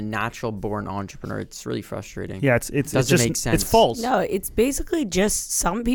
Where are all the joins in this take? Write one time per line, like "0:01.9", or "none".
0:04.0